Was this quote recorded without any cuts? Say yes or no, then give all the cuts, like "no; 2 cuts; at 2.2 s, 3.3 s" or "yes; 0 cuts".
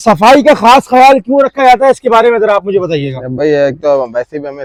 yes; 0 cuts